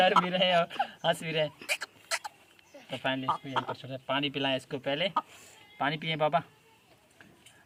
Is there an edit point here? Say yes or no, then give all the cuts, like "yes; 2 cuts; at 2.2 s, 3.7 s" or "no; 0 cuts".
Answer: no; 0 cuts